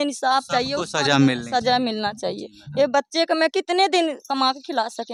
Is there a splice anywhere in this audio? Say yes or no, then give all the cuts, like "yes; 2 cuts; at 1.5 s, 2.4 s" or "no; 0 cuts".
no; 0 cuts